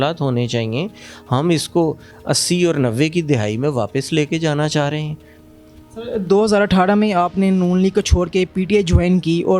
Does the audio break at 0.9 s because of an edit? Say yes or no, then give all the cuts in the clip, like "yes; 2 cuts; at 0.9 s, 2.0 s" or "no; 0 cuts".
no; 0 cuts